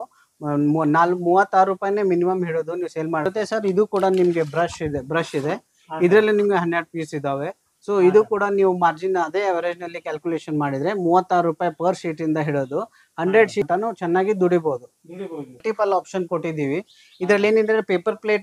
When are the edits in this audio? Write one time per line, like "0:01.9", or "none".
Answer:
0:03.3
0:13.7
0:15.6